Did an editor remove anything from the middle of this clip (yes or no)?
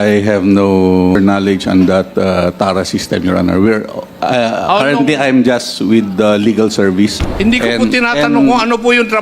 yes